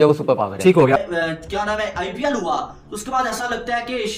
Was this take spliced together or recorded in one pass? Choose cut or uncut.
uncut